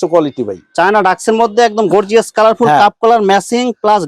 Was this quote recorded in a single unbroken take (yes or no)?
yes